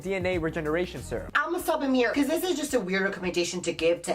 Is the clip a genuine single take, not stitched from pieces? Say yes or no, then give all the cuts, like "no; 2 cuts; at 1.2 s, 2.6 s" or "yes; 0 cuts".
no; 1 cut; at 1.3 s